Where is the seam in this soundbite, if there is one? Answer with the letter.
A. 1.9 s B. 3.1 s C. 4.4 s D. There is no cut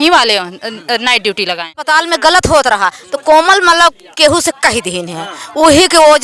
A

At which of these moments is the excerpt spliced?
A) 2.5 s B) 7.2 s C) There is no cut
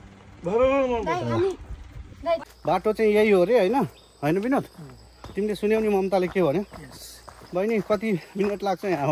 A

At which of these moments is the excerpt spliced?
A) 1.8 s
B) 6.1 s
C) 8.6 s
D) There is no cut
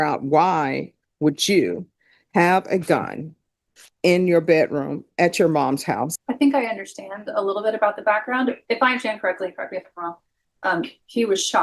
B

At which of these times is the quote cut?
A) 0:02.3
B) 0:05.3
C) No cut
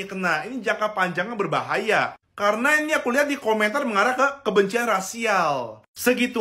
C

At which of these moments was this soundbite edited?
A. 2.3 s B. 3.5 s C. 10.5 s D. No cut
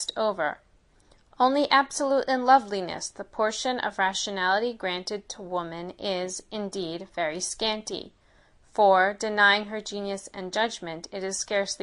A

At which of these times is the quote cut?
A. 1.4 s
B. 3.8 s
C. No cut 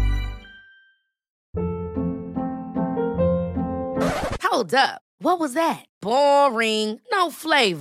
A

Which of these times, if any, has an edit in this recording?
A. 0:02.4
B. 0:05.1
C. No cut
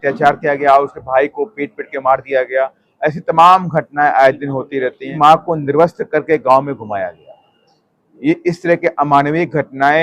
B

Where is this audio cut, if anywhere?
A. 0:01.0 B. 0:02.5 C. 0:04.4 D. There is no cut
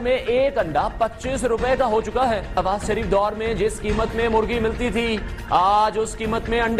B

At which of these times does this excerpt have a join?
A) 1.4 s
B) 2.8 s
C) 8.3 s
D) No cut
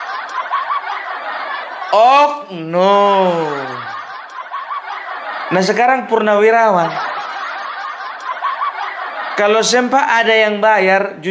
D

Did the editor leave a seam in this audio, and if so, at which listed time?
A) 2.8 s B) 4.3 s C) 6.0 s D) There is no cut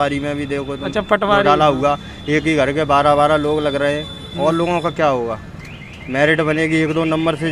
D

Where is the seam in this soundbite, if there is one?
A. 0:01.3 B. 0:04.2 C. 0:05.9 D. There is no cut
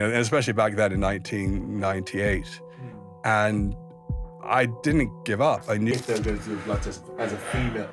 C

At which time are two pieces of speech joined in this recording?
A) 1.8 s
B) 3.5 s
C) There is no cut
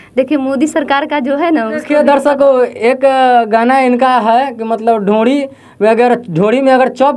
A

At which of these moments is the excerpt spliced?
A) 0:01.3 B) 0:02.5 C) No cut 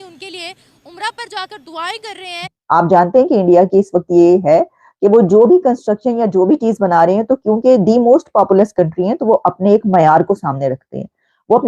B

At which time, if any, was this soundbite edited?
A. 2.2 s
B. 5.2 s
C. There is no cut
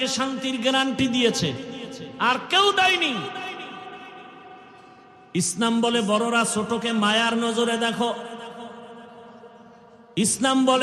B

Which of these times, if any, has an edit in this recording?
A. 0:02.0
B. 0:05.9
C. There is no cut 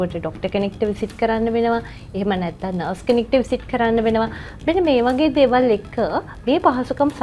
C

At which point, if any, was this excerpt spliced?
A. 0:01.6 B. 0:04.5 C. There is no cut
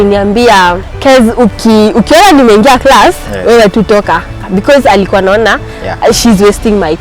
B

